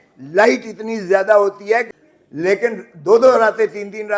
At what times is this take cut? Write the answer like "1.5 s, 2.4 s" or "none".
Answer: 2.0 s